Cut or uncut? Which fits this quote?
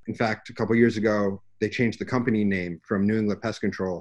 uncut